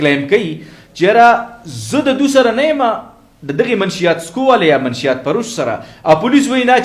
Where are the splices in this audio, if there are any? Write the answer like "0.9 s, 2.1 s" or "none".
none

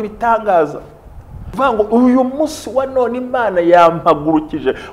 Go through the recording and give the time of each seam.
1.4 s

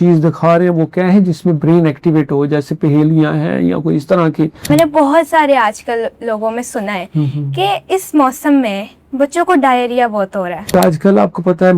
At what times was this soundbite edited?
4.7 s, 10.7 s

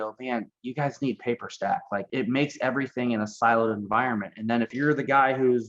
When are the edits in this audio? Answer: 2.1 s, 4.7 s

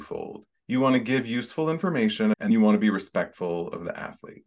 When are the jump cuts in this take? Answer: 2.5 s

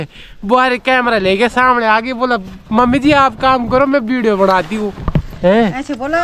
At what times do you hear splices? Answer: 5.3 s

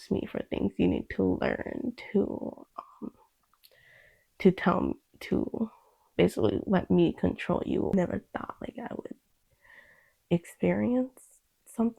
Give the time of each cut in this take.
7.9 s

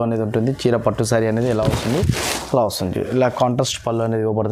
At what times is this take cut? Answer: none

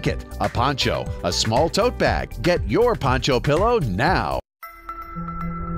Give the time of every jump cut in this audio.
2.3 s, 4.4 s

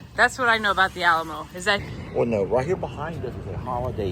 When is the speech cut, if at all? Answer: 1.8 s

